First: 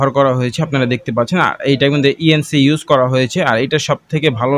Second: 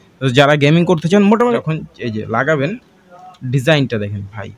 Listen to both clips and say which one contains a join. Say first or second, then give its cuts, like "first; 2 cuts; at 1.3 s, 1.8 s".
second; 1 cut; at 1.4 s